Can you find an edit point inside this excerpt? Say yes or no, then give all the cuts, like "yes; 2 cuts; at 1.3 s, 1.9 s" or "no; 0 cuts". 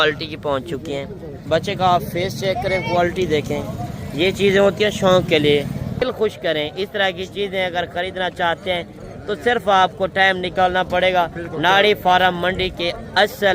yes; 2 cuts; at 1.5 s, 6.0 s